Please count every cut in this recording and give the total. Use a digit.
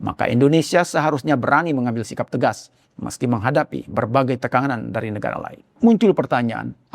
1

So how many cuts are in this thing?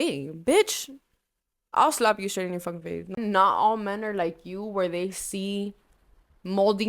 1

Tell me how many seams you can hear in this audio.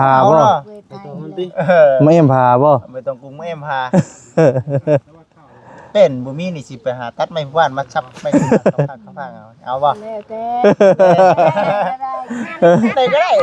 0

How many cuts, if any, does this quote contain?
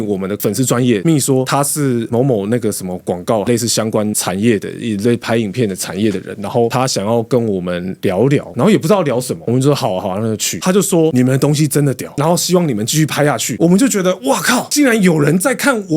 2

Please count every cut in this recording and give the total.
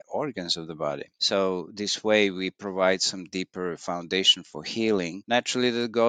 1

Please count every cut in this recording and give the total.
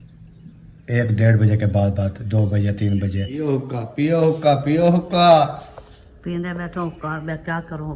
1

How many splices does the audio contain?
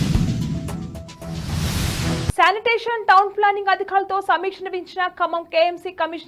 1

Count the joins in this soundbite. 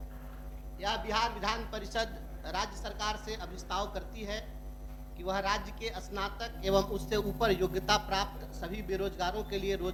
0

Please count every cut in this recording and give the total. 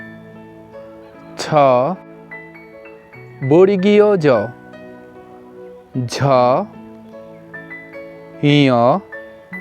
6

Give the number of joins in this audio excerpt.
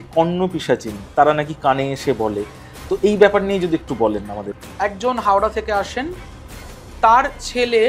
1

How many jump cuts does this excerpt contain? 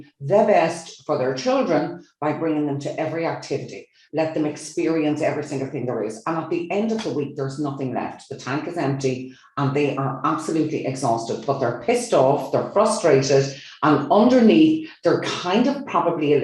0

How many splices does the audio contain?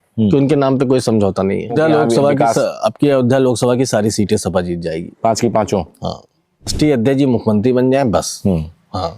2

